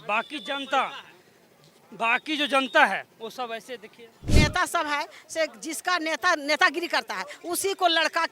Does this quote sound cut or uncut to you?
cut